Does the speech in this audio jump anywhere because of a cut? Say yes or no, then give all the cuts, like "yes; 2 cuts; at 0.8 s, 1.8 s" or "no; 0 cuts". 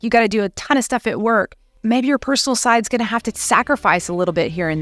yes; 1 cut; at 1.7 s